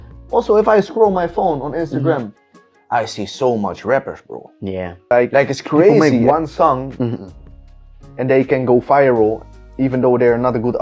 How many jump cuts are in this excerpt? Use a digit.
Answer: 1